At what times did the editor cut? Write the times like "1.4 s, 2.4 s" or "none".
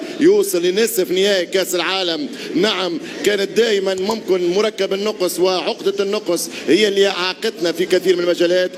none